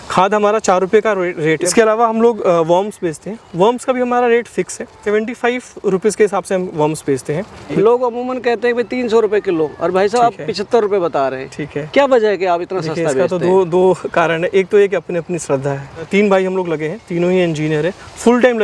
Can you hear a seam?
yes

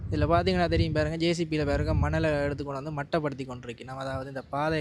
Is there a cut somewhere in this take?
no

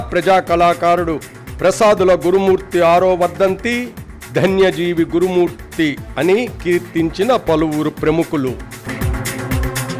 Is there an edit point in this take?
no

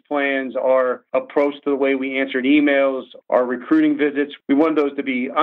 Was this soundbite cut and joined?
yes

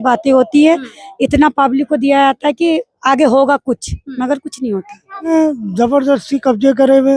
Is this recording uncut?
no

